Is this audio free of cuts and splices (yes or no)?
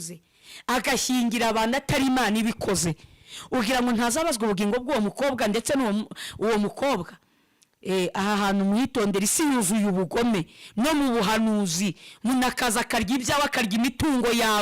yes